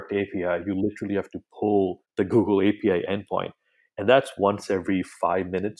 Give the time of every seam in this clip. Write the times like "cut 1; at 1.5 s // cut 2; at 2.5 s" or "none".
cut 1; at 2.0 s